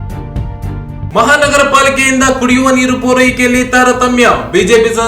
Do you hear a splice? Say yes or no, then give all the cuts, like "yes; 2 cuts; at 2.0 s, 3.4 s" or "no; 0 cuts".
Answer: yes; 1 cut; at 1.1 s